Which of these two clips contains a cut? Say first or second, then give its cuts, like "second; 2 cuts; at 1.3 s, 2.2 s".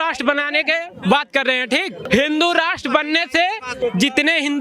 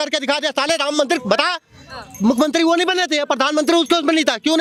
first; 2 cuts; at 2.0 s, 3.7 s